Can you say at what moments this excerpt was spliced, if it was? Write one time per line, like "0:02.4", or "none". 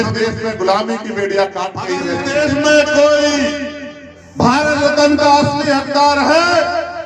0:02.0

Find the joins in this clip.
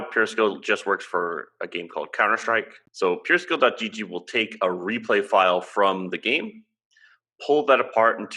0:02.8

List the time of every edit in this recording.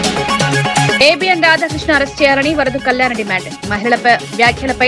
0:00.9

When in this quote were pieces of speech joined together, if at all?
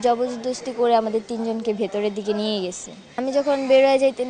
0:03.2

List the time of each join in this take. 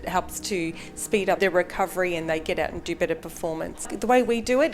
0:01.4
0:03.9

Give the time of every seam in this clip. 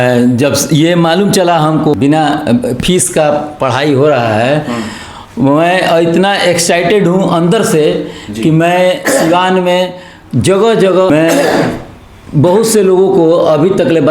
0:01.9
0:11.1

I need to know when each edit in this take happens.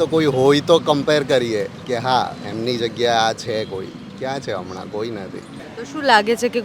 0:05.6

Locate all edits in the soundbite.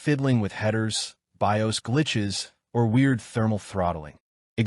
0:03.4

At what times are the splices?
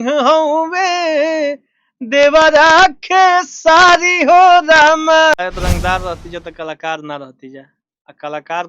0:05.3

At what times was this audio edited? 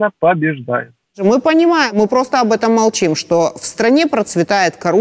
0:01.2
0:01.9

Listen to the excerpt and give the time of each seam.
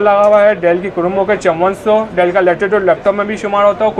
none

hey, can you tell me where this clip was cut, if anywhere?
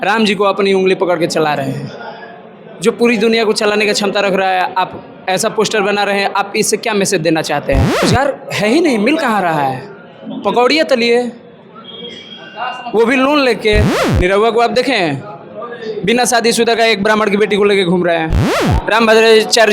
0:08.0
0:14.0
0:18.6

